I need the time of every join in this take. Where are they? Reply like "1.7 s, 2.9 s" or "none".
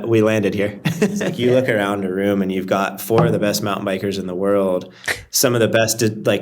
1.4 s